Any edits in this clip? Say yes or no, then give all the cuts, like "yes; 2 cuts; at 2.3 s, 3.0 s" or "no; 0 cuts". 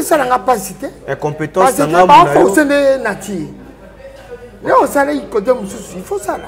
no; 0 cuts